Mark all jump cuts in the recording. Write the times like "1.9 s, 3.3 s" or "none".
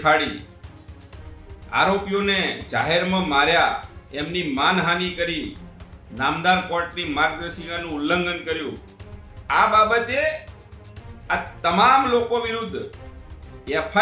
none